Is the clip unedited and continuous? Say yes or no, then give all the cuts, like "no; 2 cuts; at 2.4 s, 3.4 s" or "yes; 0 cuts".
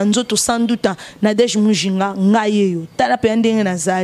yes; 0 cuts